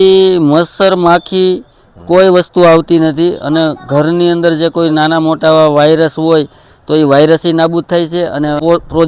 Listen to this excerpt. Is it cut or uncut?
uncut